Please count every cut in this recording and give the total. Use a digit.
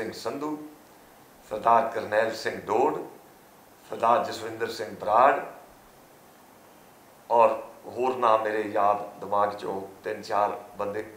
0